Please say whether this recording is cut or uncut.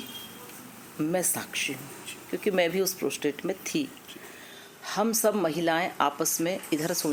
uncut